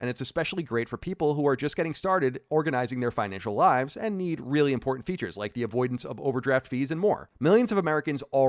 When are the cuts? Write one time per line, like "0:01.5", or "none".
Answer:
0:07.3